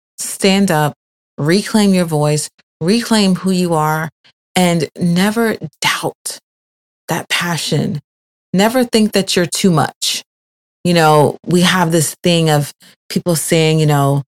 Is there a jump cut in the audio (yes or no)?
no